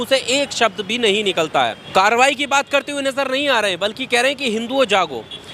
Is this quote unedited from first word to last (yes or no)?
no